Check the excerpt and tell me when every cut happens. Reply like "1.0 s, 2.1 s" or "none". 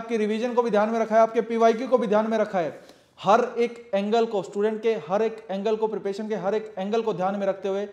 none